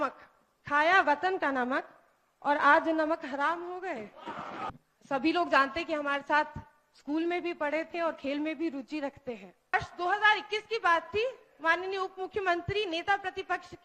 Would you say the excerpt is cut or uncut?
cut